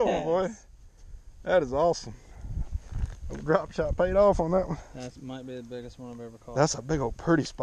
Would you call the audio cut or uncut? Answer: uncut